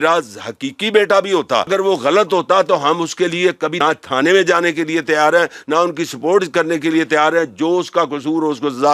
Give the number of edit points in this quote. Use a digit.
2